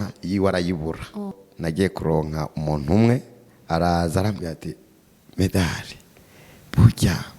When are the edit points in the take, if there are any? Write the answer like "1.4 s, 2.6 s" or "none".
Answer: 1.4 s